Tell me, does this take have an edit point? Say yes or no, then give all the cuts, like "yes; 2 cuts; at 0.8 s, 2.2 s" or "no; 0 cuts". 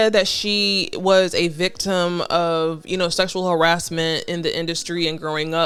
no; 0 cuts